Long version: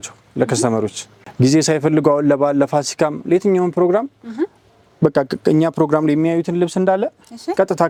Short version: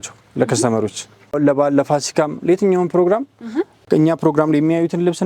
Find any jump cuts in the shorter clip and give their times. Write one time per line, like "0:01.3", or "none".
0:01.4
0:03.8